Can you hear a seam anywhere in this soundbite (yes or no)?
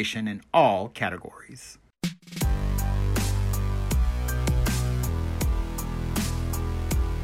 yes